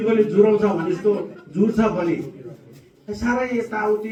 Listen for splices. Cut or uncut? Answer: uncut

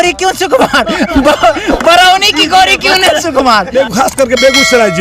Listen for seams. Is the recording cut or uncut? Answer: cut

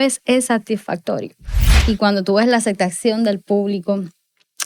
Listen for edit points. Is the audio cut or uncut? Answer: cut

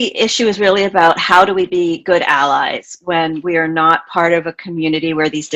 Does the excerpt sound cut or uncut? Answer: uncut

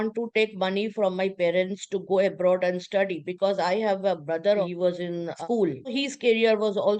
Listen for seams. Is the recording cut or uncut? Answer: cut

